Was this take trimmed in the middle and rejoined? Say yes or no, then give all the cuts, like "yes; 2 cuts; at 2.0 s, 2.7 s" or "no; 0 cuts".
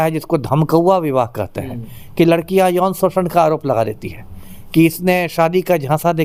no; 0 cuts